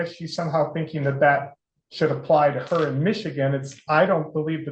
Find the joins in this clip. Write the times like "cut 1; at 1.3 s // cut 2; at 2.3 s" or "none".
none